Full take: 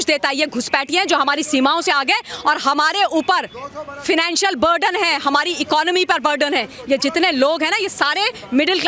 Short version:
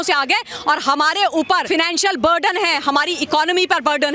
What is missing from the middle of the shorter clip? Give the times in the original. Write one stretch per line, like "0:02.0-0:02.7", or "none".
0:03.4-0:04.0